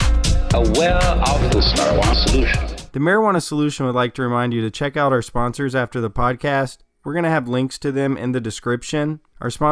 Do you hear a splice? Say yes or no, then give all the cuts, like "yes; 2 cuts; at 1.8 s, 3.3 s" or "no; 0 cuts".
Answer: yes; 1 cut; at 2.8 s